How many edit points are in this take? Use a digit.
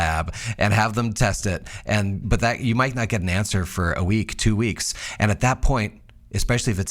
1